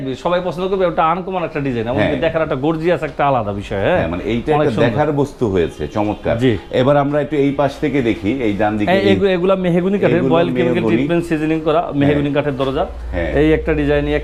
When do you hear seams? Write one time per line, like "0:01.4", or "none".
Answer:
none